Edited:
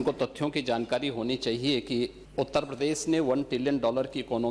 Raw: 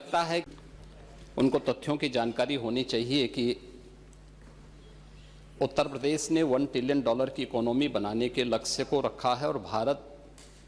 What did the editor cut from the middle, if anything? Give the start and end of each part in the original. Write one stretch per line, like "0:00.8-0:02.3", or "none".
0:03.7-0:05.4